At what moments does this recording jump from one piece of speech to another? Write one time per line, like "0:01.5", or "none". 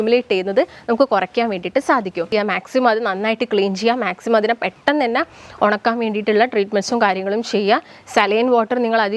0:02.3